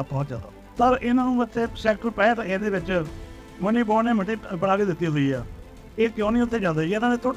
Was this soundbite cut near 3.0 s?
no; 0 cuts

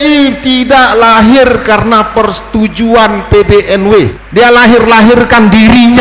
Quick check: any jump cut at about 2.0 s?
no; 1 cut; at 4.2 s

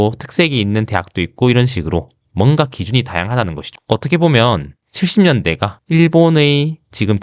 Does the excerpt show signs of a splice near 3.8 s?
yes; 1 cut; at 3.8 s

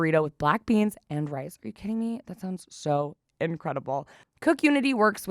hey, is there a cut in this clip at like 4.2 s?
yes; 1 cut; at 4.2 s

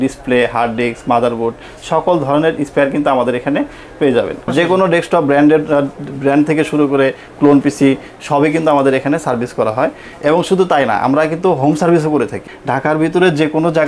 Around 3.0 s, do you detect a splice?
no; 2 cuts; at 4.5 s, 12.4 s

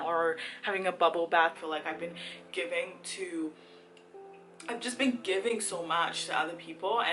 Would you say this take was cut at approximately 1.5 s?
yes; 1 cut; at 1.5 s

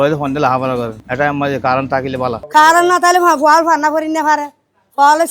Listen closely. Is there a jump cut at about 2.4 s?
yes; 2 cuts; at 1.0 s, 2.4 s

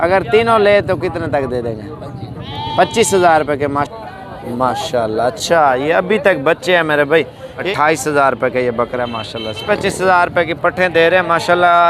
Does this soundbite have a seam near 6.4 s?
no; 3 cuts; at 3.9 s, 7.7 s, 9.6 s

